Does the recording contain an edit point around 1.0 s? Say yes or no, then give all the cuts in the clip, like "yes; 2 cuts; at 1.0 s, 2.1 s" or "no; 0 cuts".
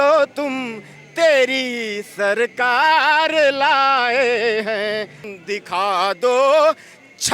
no; 1 cut; at 5.2 s